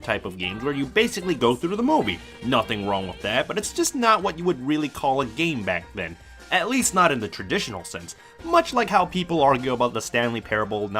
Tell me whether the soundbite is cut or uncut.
cut